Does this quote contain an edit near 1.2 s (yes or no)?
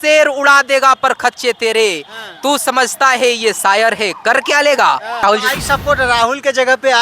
no